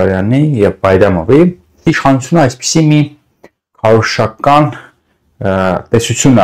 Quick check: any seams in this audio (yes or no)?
yes